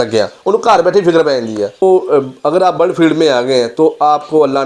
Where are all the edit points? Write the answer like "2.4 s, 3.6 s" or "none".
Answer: 1.8 s